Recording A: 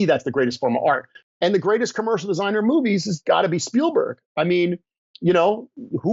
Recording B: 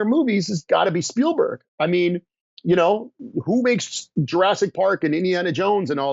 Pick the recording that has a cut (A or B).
A